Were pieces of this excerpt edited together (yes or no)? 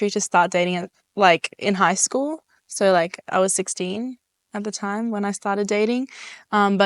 no